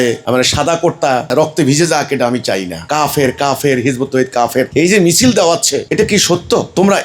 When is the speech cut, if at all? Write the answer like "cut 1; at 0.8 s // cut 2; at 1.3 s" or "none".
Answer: cut 1; at 2.8 s